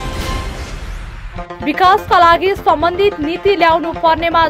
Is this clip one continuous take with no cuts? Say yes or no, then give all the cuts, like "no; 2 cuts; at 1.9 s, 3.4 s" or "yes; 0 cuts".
yes; 0 cuts